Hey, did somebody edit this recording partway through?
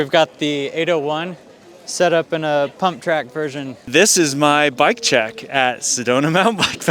yes; 1 cut; at 3.8 s

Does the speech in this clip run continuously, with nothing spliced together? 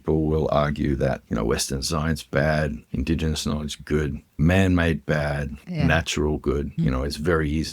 no; 5 cuts; at 1.2 s, 2.8 s, 4.4 s, 5.6 s, 6.7 s

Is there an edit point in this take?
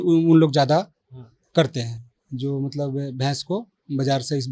no; 0 cuts

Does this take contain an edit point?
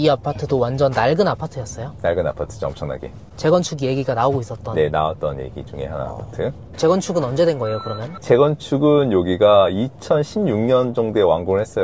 no; 0 cuts

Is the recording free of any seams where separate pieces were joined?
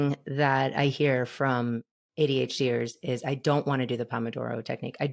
yes; 0 cuts

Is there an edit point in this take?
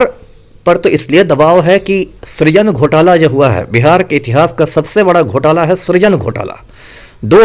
no; 0 cuts

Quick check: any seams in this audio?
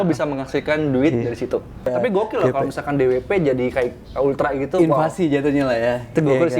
yes; 1 cut; at 1.8 s

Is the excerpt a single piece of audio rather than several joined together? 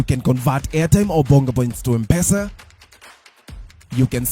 yes; 0 cuts

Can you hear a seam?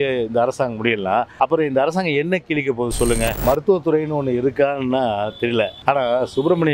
yes; 3 cuts; at 1.3 s, 3.4 s, 5.8 s

